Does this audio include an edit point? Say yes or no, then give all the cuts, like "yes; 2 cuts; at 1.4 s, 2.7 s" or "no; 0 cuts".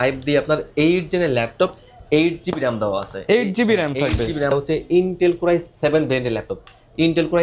yes; 1 cut; at 4.5 s